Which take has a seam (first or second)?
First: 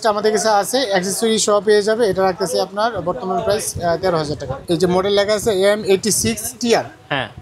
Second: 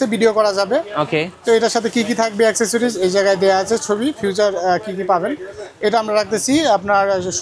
first